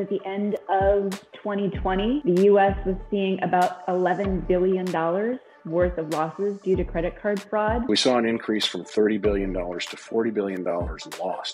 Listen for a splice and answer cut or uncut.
cut